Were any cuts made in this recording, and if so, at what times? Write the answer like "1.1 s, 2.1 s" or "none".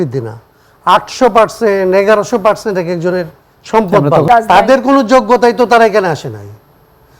4.3 s